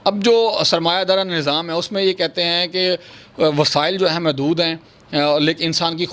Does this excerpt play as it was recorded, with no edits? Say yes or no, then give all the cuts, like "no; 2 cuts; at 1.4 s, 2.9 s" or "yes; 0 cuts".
yes; 0 cuts